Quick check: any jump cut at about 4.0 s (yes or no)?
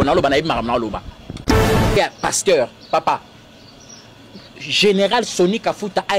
no